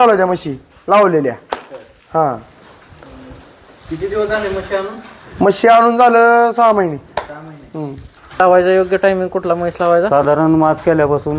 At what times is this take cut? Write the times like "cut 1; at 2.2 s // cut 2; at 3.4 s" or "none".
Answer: cut 1; at 8.4 s